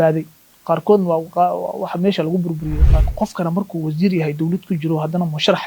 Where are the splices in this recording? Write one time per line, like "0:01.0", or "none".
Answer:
0:02.9